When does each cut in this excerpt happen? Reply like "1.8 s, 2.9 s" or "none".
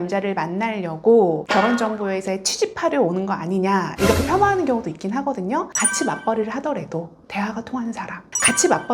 5.7 s